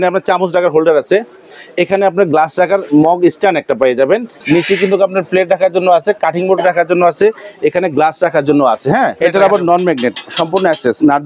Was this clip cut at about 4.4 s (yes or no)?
yes